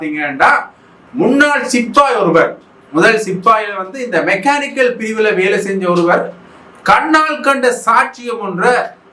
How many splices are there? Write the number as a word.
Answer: zero